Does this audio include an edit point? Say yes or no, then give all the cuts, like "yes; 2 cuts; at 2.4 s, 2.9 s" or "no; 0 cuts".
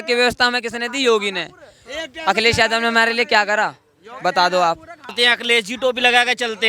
no; 0 cuts